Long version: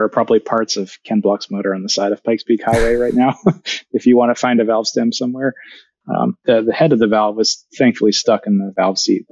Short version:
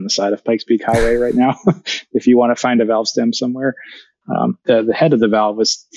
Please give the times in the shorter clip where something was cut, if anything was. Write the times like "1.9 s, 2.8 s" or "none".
none